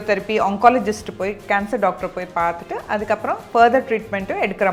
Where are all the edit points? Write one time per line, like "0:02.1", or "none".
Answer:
none